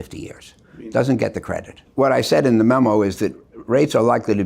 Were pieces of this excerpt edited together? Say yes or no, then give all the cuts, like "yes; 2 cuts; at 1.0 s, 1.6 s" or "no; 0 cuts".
yes; 1 cut; at 1.8 s